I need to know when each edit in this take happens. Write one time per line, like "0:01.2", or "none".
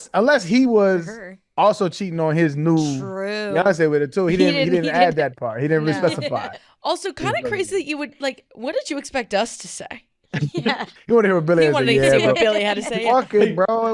0:10.9